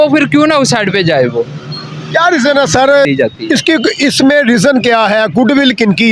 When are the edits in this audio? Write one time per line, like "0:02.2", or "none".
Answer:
0:03.1